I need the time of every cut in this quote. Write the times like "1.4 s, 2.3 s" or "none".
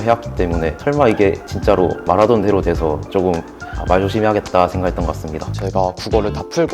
5.4 s